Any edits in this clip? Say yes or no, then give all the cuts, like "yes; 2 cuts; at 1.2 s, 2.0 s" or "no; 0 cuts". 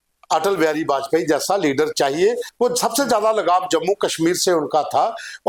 yes; 1 cut; at 2.5 s